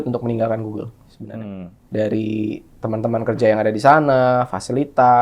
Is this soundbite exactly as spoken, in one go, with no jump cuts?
no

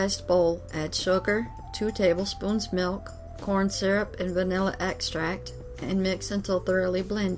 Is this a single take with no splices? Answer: yes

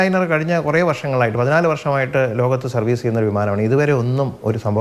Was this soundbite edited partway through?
no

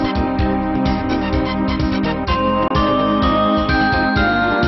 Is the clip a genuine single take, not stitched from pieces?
no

